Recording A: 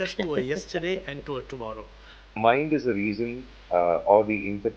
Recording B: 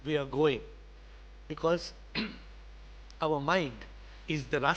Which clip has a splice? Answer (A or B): A